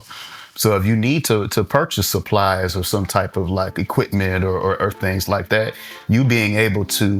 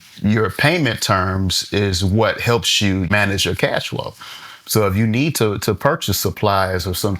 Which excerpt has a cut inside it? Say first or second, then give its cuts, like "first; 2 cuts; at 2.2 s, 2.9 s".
second; 1 cut; at 3.1 s